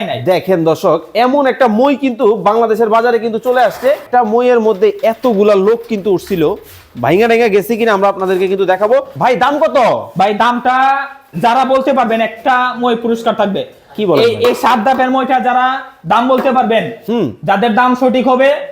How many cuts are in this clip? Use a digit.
2